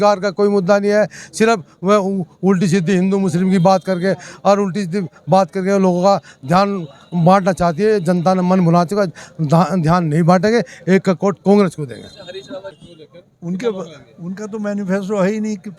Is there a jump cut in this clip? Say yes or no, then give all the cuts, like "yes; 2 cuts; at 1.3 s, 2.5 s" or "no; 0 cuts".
yes; 1 cut; at 12.8 s